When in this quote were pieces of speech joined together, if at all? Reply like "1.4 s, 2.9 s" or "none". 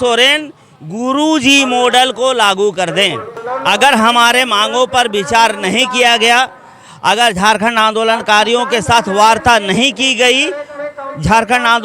3.4 s